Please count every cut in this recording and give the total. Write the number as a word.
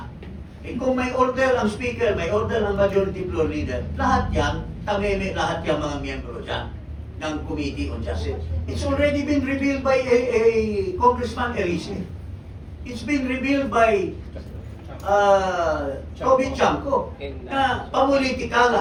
zero